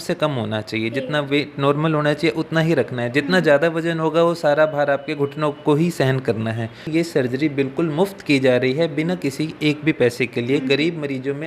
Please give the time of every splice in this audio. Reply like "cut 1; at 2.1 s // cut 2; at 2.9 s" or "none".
cut 1; at 6.9 s